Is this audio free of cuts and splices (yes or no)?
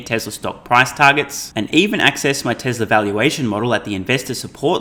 yes